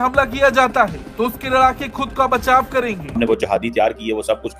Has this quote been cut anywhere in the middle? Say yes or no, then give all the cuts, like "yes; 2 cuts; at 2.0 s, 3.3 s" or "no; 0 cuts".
yes; 1 cut; at 3.2 s